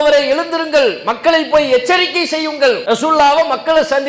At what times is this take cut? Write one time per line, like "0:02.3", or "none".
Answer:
0:02.8